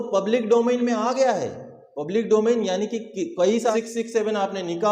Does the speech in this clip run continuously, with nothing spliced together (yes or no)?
no